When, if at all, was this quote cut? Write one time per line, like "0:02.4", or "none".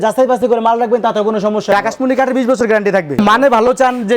0:01.7
0:03.2